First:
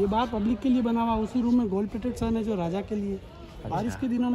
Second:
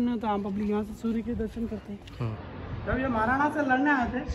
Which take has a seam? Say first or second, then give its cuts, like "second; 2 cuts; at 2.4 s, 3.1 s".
second; 1 cut; at 2.3 s